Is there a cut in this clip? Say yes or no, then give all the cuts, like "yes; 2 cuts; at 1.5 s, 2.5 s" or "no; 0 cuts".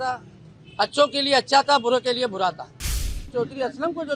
yes; 1 cut; at 3.2 s